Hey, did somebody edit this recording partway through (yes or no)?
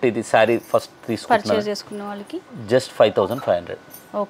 no